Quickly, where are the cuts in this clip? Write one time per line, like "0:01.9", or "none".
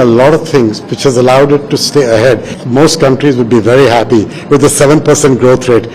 0:02.5